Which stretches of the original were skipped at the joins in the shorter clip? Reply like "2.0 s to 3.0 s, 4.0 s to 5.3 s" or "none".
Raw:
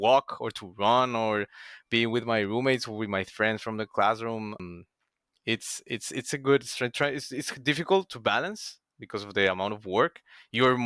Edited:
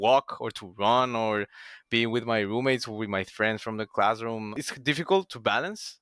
4.6 s to 7.4 s